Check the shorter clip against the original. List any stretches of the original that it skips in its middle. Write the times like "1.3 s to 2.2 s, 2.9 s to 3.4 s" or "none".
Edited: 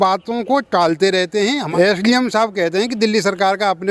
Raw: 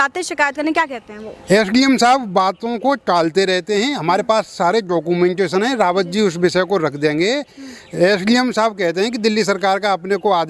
4.0 s to 7.9 s